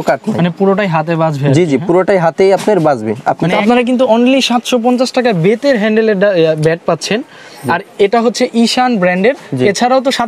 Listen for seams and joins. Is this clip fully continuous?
no; 1 cut; at 3.6 s

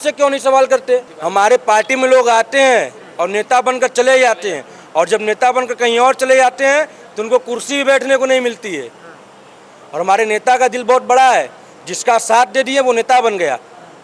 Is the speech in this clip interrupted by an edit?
no; 0 cuts

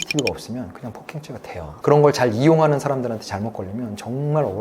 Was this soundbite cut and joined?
yes; 1 cut; at 1.7 s

